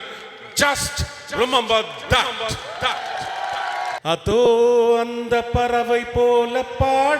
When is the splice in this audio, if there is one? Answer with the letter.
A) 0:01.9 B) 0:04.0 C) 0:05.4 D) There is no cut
B